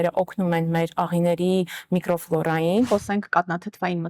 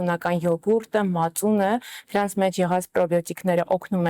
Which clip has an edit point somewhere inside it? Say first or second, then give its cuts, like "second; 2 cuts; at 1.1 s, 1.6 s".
first; 1 cut; at 2.9 s